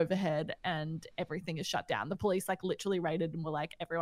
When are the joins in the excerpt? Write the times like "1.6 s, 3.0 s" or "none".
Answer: none